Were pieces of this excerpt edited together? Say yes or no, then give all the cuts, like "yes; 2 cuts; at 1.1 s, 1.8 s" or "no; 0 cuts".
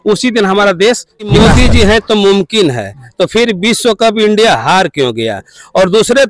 yes; 1 cut; at 1.3 s